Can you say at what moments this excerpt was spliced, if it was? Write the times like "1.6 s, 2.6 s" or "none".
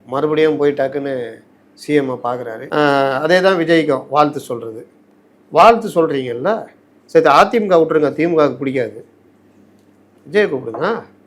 2.6 s